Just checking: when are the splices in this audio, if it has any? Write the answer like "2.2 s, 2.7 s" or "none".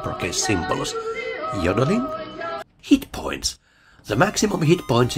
2.5 s